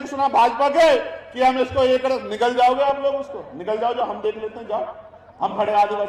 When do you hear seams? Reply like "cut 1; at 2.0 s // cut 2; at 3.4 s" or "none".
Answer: none